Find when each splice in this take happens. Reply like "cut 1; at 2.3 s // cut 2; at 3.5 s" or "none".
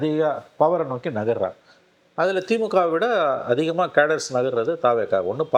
none